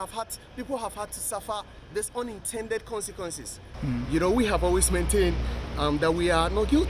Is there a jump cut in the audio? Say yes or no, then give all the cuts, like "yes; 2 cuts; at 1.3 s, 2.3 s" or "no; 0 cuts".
yes; 1 cut; at 3.8 s